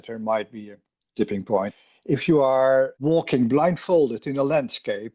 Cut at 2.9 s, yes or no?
yes